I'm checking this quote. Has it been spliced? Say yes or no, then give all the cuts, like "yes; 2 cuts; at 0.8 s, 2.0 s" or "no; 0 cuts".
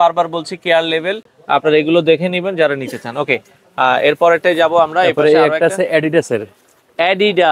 no; 0 cuts